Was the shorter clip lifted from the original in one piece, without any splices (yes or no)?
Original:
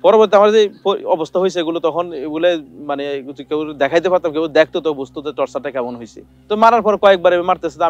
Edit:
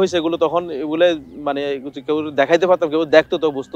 yes